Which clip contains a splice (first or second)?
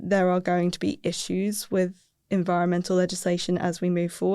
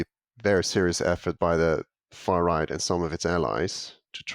first